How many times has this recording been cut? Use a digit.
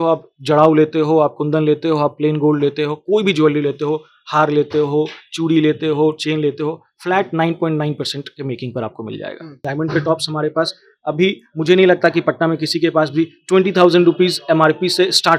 1